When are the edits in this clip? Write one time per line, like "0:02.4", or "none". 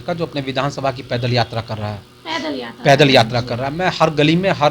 none